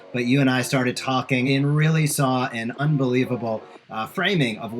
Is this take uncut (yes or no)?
no